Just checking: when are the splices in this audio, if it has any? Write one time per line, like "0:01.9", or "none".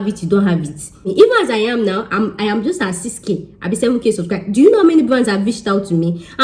0:01.0